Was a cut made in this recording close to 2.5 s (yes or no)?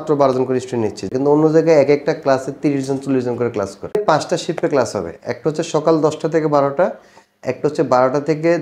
no